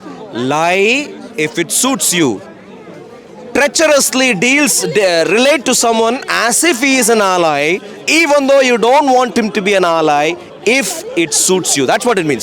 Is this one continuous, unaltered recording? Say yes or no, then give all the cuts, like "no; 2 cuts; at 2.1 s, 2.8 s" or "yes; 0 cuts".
yes; 0 cuts